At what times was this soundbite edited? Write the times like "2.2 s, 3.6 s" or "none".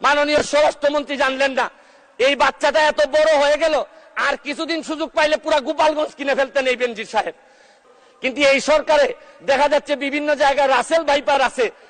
7.8 s